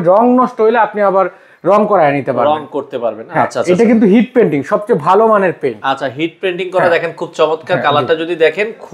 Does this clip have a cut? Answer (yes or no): no